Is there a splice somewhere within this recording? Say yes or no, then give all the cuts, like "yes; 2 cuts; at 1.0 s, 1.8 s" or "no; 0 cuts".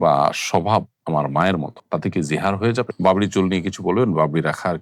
yes; 1 cut; at 2.9 s